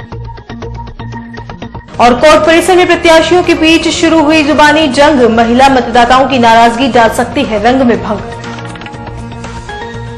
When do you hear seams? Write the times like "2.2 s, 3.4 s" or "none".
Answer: 1.4 s